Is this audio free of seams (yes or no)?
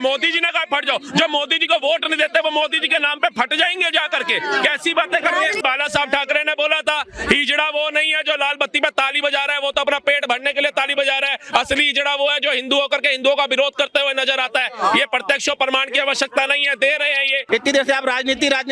no